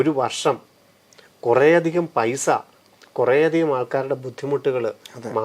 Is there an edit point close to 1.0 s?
no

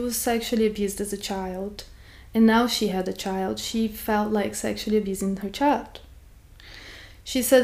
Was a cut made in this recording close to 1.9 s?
no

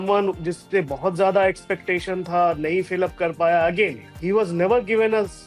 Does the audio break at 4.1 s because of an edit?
yes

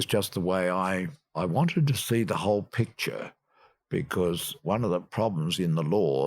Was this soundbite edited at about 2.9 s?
no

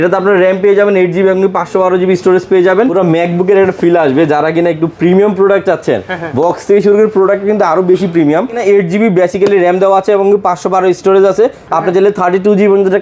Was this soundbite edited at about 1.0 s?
no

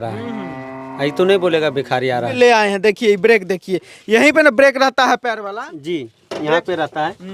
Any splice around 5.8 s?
no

